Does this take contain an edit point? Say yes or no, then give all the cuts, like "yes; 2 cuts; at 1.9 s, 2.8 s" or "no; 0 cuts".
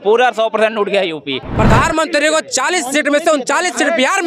yes; 1 cut; at 1.4 s